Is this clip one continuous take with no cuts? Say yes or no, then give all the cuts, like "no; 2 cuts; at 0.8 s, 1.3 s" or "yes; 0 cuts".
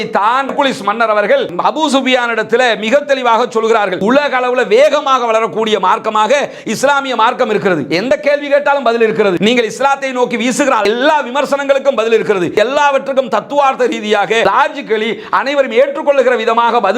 no; 3 cuts; at 4.0 s, 12.6 s, 14.4 s